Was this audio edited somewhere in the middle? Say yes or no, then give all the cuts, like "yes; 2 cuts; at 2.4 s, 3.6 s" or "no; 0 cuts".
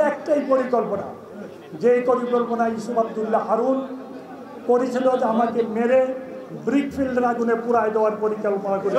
no; 0 cuts